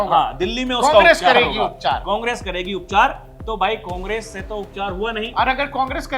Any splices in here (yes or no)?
no